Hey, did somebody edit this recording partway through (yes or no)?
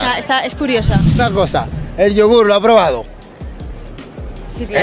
yes